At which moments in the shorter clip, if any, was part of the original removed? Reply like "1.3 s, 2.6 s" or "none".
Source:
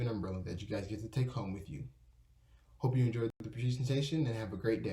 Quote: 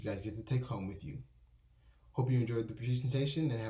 2.7 s